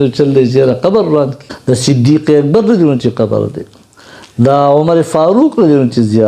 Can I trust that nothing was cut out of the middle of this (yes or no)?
no